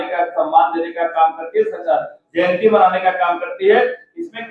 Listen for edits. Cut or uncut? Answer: uncut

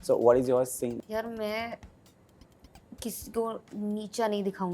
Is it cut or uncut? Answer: cut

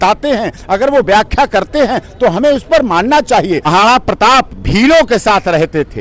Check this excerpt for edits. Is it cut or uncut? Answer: cut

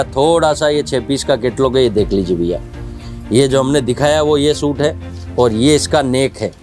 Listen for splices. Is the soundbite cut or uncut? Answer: uncut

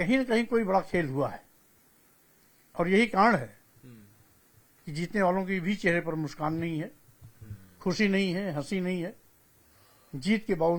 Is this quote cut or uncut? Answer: uncut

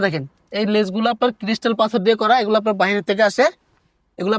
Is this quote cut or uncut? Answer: uncut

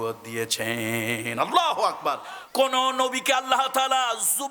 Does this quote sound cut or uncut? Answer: cut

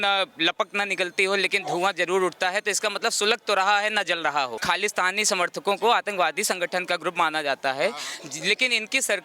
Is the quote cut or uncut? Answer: cut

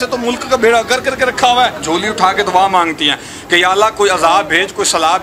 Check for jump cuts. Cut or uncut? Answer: cut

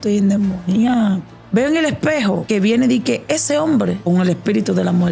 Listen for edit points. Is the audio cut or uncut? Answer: cut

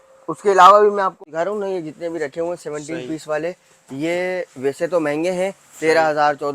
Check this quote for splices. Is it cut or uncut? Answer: cut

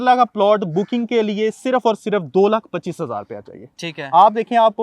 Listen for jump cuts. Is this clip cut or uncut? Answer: uncut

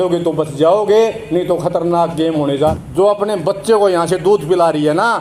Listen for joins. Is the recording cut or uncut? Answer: cut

